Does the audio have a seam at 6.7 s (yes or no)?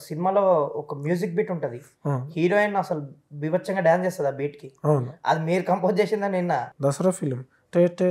yes